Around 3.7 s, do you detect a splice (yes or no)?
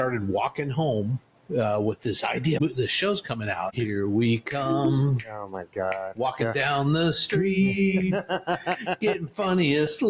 yes